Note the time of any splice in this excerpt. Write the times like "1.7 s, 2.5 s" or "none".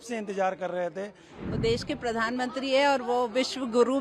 1.2 s